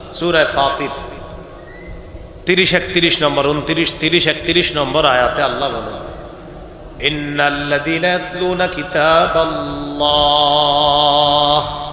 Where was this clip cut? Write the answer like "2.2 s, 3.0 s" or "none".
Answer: none